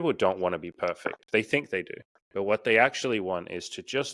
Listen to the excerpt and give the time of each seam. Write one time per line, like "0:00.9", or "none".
0:02.3